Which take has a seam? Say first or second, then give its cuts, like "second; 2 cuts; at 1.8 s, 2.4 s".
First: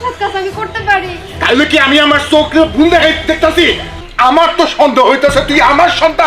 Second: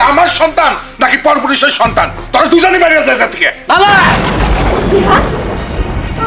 first; 1 cut; at 3.9 s